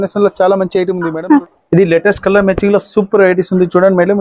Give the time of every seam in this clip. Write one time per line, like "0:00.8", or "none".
0:01.0